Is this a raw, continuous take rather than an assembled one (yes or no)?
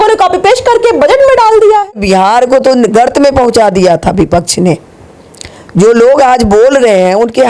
no